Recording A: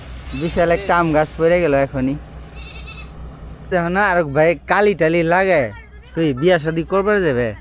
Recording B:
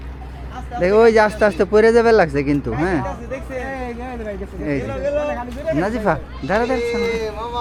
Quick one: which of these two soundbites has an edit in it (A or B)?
A